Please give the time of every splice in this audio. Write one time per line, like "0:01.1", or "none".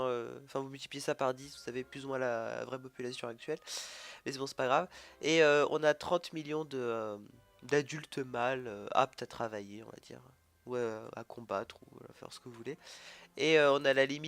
0:07.0